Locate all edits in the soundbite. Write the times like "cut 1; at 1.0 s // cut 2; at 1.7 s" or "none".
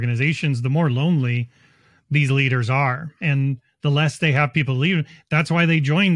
none